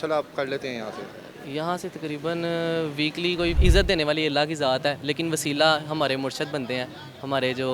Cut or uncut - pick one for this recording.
cut